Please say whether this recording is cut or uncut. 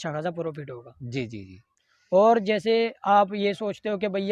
uncut